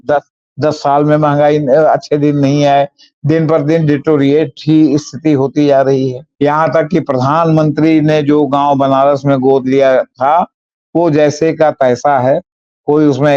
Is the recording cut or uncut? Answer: cut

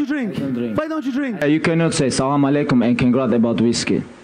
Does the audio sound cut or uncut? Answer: cut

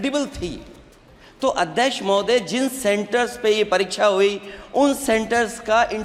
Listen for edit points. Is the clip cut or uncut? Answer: uncut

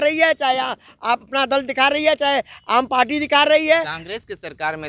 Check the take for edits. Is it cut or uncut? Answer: uncut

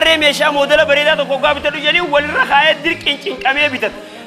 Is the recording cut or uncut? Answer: uncut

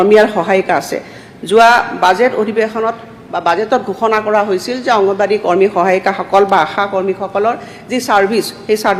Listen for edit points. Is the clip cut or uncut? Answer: uncut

